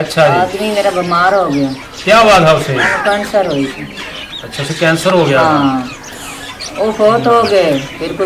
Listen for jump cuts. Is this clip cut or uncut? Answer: uncut